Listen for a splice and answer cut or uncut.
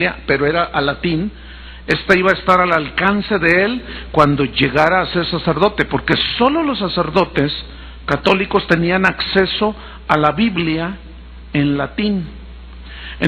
cut